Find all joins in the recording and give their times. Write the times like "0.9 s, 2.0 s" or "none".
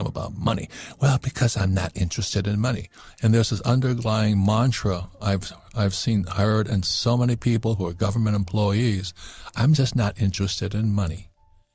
none